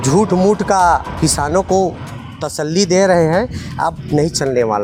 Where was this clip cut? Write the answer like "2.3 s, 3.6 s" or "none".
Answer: none